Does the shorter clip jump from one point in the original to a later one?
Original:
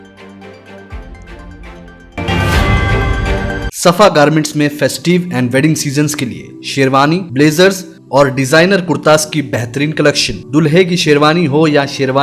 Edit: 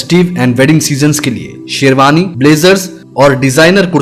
no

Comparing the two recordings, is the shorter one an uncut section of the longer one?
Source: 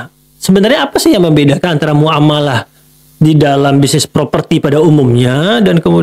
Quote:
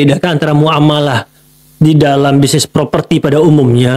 yes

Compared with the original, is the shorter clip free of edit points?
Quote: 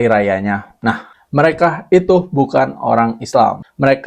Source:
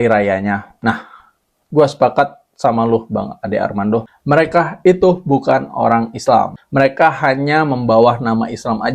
no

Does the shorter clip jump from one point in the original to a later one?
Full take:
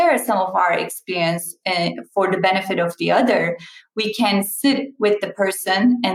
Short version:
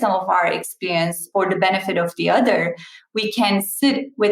yes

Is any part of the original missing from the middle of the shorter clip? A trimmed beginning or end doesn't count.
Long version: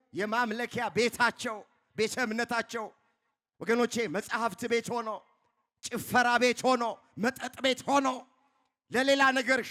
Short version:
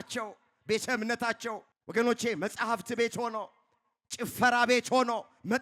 yes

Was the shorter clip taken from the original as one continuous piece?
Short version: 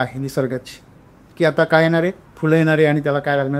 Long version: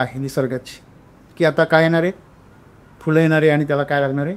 no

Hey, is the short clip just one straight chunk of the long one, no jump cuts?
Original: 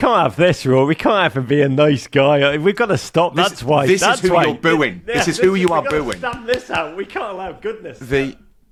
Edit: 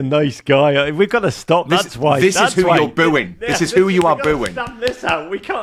yes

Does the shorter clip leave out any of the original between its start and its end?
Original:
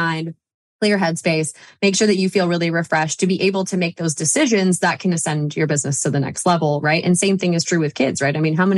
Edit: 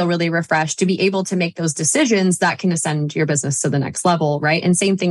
no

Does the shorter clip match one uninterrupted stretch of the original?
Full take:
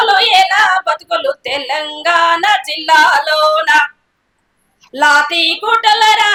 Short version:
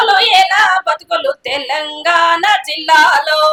yes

